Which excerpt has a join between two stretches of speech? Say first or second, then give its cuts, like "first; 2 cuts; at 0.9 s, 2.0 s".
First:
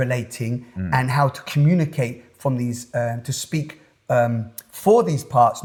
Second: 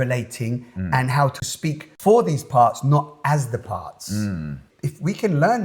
second; 2 cuts; at 1.5 s, 4.7 s